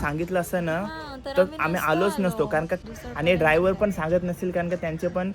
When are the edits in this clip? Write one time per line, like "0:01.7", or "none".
0:02.5